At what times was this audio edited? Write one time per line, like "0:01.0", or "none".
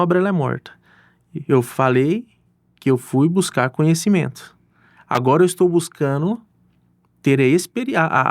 none